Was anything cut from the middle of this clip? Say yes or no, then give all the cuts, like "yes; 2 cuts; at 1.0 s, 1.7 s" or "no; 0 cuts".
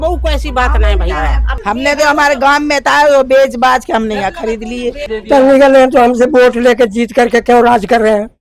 yes; 2 cuts; at 1.5 s, 5.0 s